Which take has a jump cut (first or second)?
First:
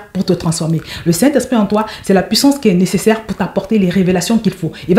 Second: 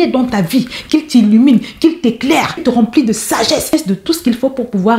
second